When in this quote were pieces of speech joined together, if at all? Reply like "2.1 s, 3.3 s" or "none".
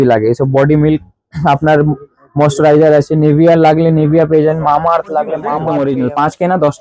5.5 s